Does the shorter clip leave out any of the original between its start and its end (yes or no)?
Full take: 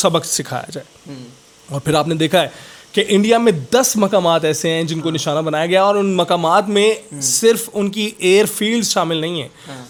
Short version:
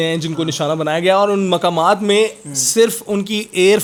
no